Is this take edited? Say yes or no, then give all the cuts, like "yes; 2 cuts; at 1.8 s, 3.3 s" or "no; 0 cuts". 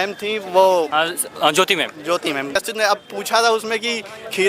yes; 1 cut; at 2.5 s